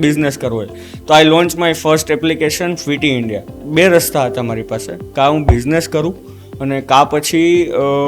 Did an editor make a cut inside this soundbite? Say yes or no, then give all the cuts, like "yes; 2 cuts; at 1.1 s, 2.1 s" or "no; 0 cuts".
yes; 1 cut; at 3.6 s